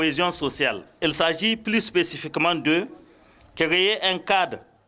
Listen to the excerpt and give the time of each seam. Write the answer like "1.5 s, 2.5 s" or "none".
0.9 s